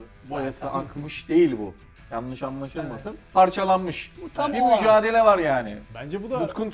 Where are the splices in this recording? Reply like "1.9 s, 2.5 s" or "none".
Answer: 5.8 s

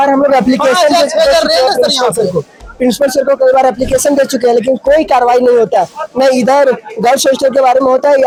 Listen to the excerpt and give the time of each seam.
none

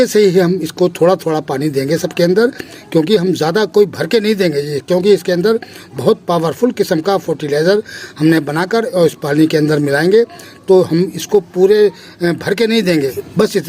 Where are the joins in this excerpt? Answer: none

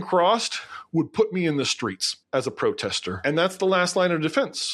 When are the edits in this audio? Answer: 3.1 s

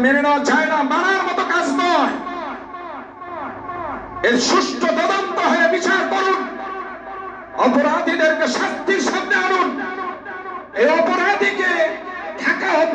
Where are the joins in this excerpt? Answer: none

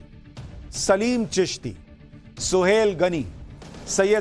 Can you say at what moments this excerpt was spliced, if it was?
2.8 s

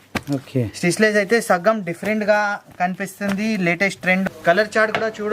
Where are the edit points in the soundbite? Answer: 4.2 s

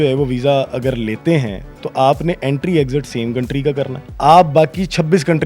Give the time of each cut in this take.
4.0 s

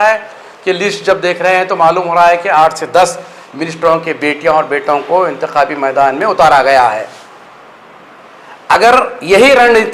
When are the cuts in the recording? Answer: none

